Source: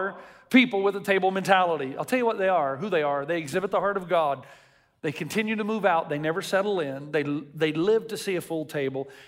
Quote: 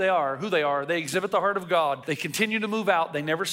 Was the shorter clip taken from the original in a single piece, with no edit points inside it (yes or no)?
no